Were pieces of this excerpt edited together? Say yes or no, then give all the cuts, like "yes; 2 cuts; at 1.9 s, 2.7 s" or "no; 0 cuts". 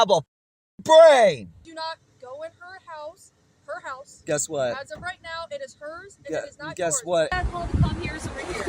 yes; 2 cuts; at 1.7 s, 7.3 s